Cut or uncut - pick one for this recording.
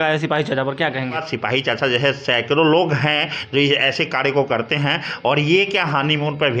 cut